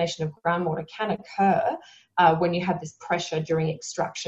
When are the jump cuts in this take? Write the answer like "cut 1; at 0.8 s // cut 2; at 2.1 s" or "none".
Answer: none